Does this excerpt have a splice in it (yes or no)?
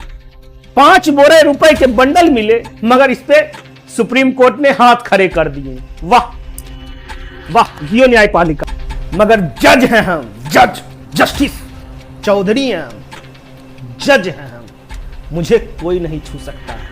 yes